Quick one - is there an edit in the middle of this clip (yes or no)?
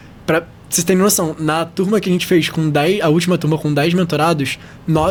no